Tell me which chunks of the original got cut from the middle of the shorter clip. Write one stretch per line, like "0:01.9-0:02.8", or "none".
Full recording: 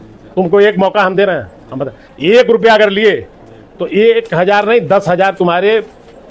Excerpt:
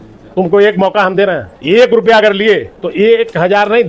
0:01.5-0:02.1
0:03.3-0:03.7